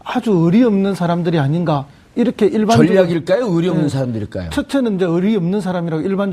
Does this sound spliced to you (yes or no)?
no